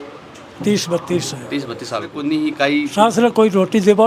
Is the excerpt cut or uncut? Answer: cut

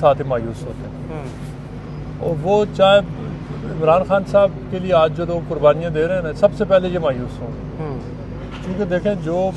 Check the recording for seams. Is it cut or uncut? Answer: uncut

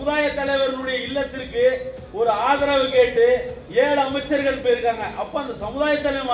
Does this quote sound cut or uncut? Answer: uncut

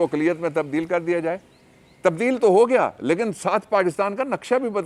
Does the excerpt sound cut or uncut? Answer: uncut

